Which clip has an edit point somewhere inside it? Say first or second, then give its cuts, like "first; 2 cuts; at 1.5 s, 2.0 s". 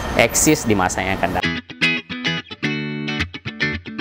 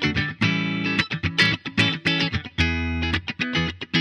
first; 1 cut; at 1.4 s